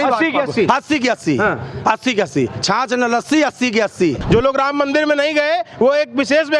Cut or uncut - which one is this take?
cut